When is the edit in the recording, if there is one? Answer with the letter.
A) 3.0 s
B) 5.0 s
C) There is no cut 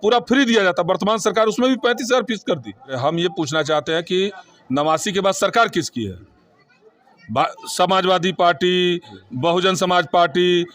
A